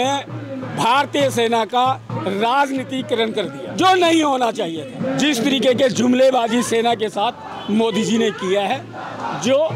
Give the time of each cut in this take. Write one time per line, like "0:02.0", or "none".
0:03.7
0:04.9